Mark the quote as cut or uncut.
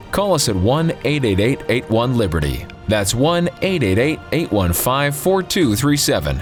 uncut